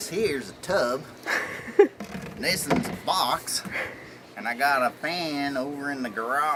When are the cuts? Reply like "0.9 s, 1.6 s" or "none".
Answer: none